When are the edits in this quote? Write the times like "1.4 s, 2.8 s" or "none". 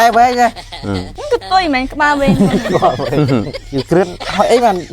1.1 s, 3.6 s

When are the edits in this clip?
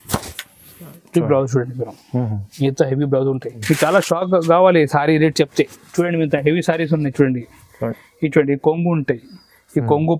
3.5 s

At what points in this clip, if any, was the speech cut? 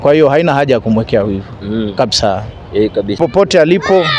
3.2 s

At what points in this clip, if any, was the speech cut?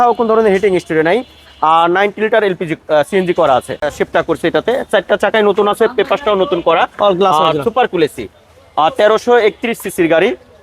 3.8 s

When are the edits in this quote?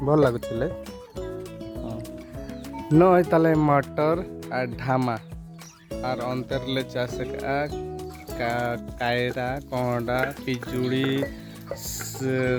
none

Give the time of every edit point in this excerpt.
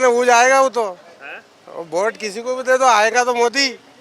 none

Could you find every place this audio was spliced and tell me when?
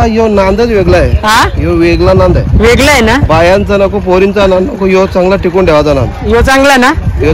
none

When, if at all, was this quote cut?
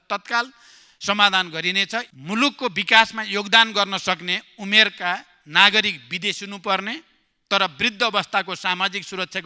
2.1 s

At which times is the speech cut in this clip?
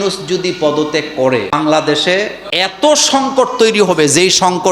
1.5 s, 2.4 s

